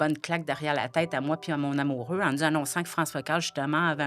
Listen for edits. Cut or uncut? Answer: uncut